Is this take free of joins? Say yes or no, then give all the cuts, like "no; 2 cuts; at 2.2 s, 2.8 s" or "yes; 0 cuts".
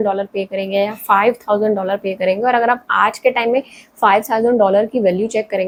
yes; 0 cuts